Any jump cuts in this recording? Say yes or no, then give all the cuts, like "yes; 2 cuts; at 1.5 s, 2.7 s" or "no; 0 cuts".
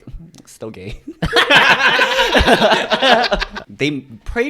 no; 0 cuts